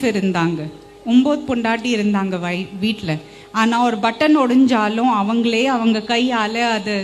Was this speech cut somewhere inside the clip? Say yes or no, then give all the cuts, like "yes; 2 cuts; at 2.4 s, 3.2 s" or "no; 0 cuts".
no; 0 cuts